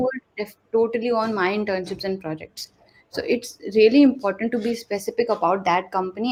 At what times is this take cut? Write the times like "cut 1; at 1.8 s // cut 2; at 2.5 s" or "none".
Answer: none